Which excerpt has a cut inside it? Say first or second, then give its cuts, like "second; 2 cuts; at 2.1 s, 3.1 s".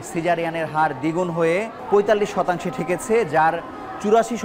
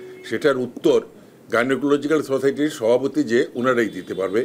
first; 1 cut; at 1.8 s